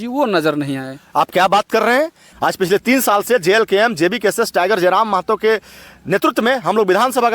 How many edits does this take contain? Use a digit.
1